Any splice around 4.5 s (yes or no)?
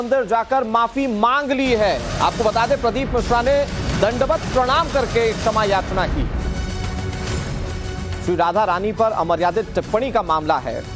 yes